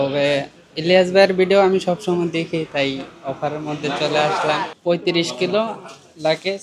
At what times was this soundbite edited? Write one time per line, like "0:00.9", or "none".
0:04.7